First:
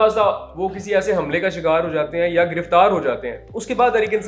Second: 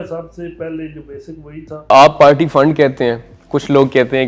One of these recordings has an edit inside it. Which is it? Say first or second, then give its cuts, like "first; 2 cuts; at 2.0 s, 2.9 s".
second; 1 cut; at 1.9 s